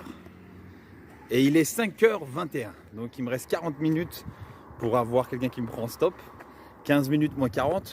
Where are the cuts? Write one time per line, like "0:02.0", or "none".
none